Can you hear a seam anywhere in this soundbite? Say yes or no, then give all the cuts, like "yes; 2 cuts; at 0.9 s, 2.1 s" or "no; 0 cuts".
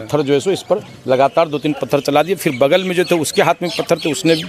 no; 0 cuts